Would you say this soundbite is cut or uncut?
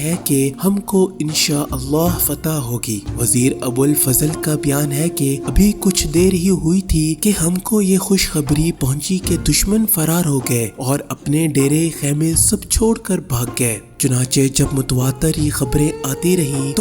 cut